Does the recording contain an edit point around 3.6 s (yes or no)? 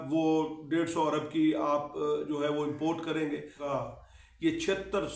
yes